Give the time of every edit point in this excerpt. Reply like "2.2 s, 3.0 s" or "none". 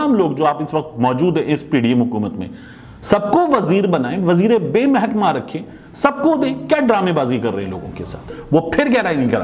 8.4 s